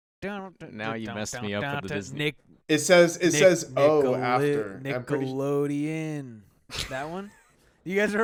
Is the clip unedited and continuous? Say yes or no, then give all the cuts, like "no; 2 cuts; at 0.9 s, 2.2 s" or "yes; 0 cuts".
yes; 0 cuts